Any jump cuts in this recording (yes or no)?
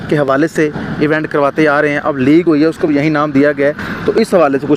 no